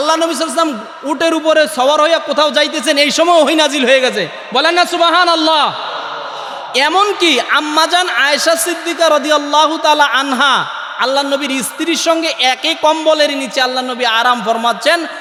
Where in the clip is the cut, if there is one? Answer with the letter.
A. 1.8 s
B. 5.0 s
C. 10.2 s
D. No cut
D